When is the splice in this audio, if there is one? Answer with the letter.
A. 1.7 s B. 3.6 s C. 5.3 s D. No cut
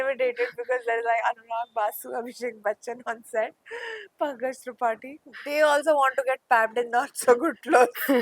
C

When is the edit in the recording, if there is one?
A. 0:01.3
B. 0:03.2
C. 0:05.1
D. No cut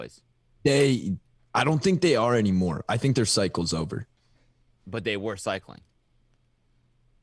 B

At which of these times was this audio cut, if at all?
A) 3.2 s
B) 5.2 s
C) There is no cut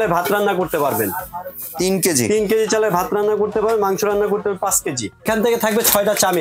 B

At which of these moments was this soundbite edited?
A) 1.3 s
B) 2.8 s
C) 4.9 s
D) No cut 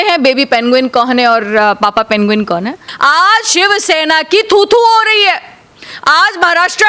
B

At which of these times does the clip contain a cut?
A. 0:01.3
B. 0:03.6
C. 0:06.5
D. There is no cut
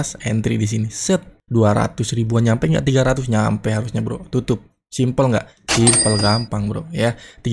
A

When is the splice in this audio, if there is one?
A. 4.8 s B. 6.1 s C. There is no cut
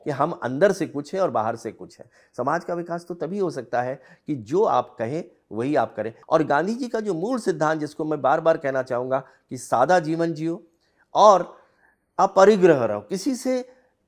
B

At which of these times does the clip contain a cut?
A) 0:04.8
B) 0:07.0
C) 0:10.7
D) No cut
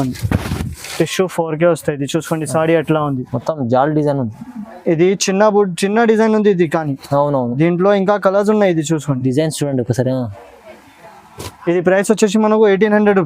D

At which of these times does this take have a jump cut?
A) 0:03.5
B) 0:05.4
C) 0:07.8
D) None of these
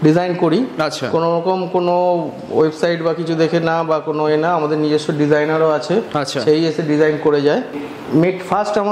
C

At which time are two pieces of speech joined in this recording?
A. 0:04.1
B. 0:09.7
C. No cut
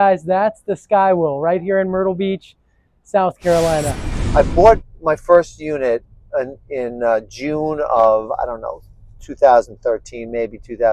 A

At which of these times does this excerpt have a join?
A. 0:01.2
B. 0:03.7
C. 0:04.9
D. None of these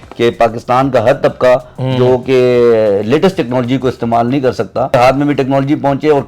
C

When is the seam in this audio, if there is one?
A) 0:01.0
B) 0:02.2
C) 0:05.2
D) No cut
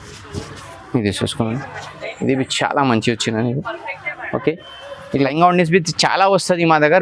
C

